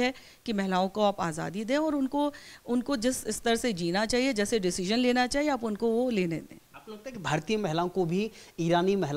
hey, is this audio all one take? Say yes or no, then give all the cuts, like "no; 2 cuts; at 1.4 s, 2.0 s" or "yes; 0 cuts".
yes; 0 cuts